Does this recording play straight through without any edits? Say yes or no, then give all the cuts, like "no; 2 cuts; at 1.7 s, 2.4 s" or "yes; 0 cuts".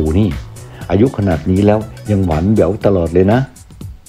yes; 0 cuts